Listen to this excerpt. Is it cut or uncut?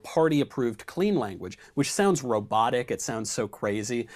uncut